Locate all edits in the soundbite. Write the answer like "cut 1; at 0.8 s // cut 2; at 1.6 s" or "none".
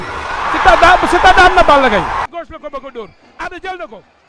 cut 1; at 2.2 s